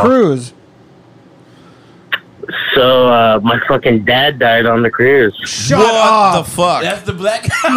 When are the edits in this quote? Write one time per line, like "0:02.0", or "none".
none